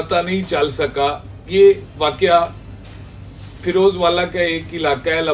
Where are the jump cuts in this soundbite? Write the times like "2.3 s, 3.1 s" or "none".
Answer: none

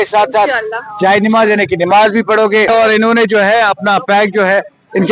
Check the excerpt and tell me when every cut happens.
2.7 s

